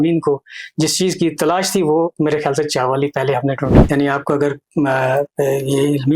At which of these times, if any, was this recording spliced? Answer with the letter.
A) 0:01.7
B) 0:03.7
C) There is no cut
B